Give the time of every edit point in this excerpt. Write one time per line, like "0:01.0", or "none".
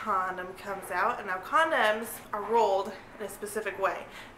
0:02.2

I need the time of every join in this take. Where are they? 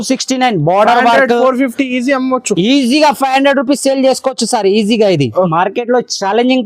0:05.5

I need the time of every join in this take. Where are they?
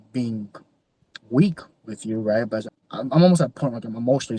0:02.7

